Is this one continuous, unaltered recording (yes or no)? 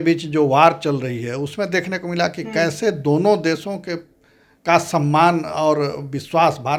yes